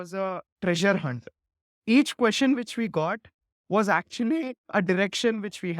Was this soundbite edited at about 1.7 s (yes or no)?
no